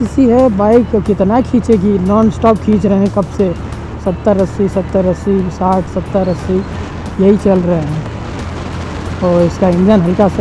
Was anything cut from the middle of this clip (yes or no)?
no